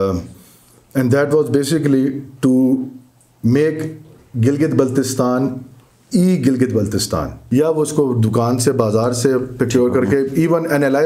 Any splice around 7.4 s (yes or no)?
yes